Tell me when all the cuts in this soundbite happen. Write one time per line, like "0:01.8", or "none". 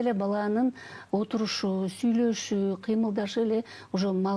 none